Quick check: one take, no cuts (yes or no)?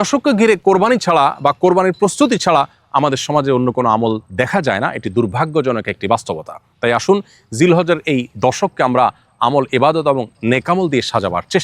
yes